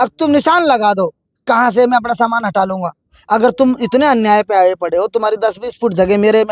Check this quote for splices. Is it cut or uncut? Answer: cut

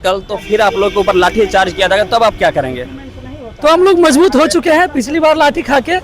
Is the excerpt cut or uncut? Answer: uncut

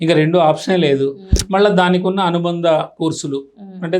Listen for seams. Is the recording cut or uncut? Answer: uncut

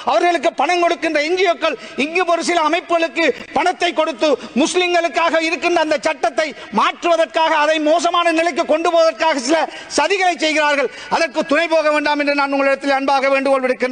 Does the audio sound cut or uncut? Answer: uncut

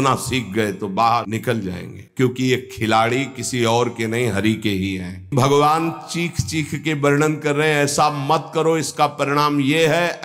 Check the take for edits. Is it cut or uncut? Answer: cut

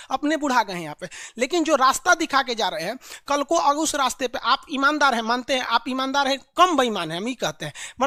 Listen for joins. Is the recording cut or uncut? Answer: uncut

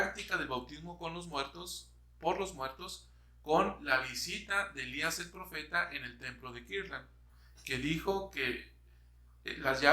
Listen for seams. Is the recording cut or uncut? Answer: uncut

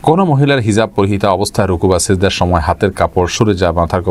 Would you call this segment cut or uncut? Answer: uncut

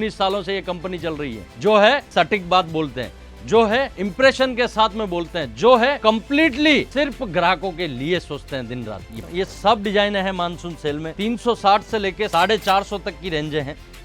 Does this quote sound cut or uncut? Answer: cut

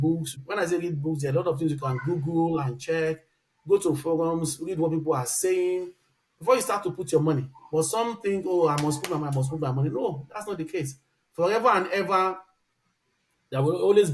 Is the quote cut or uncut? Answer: uncut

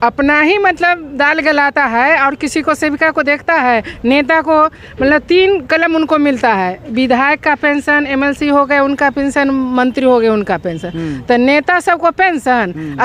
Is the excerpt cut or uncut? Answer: uncut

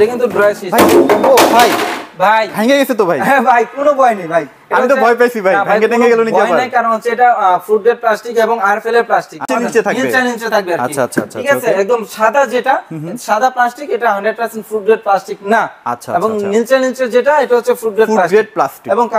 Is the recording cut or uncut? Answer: cut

